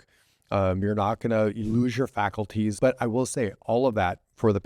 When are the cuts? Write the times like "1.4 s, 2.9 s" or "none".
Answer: 0.8 s, 2.7 s